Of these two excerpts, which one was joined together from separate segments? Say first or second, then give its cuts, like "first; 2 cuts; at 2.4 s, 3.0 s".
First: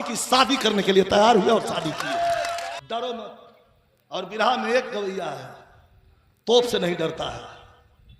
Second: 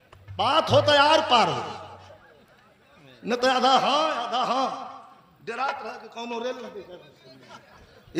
first; 1 cut; at 2.7 s